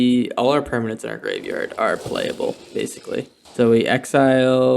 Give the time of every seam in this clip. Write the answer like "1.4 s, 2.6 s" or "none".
3.4 s